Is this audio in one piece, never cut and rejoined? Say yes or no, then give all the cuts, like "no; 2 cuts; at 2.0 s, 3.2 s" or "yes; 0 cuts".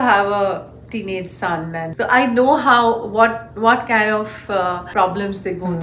no; 2 cuts; at 1.9 s, 4.9 s